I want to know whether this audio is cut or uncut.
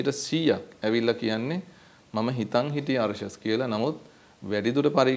uncut